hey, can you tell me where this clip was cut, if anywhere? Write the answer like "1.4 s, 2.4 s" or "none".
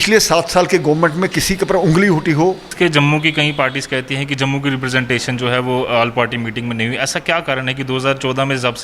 2.7 s

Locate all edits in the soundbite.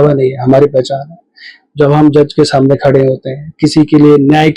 none

